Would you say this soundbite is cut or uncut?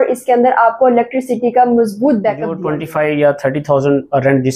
cut